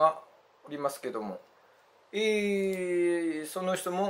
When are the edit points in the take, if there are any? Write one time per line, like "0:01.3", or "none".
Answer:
none

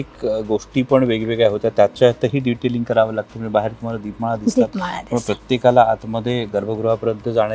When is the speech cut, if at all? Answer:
none

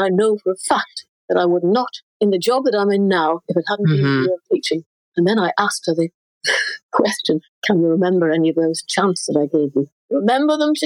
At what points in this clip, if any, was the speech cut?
none

